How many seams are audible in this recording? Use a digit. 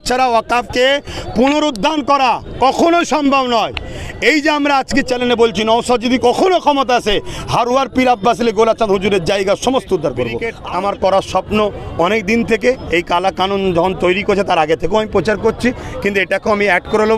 1